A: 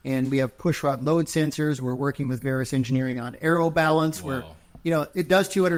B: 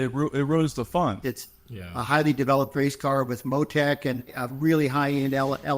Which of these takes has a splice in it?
B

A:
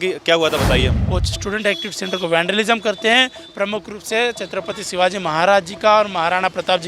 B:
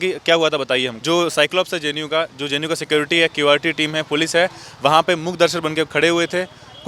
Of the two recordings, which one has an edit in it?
A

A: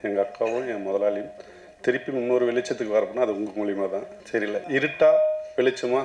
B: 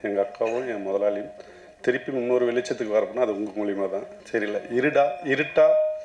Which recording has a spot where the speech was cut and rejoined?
A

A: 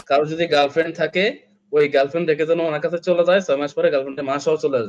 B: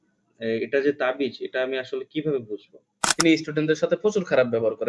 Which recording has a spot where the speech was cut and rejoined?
B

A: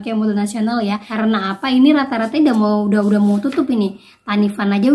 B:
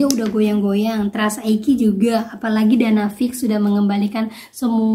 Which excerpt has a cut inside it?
A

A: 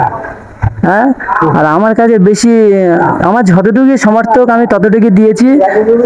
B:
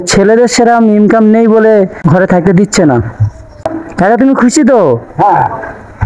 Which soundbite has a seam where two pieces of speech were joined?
B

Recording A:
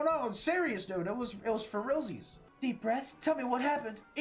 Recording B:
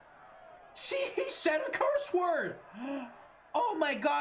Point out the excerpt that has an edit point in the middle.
A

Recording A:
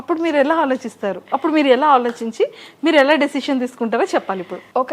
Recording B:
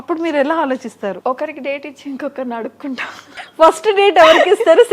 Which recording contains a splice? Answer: B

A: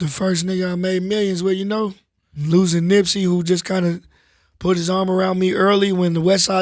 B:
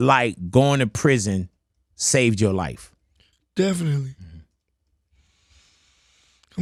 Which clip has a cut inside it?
A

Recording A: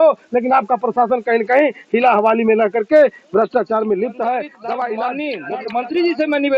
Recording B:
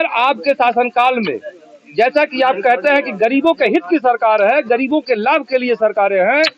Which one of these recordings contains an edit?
A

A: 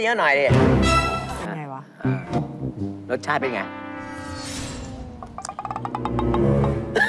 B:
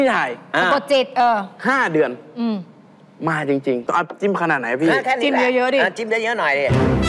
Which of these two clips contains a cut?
B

